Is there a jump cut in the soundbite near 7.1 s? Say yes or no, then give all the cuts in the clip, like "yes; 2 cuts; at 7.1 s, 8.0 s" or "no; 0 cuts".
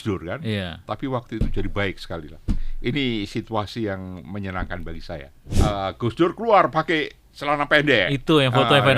no; 1 cut; at 5.4 s